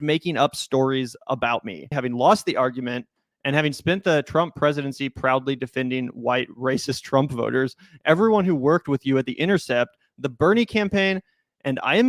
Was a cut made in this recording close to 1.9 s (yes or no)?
yes